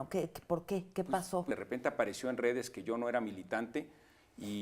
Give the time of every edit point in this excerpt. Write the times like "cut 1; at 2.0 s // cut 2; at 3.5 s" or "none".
cut 1; at 1.5 s